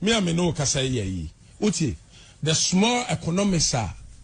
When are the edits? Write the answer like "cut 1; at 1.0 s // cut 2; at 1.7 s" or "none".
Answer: none